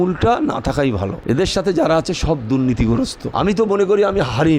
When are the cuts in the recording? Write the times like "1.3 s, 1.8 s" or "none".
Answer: 1.1 s, 3.2 s